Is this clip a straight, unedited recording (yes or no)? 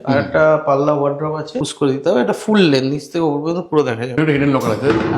no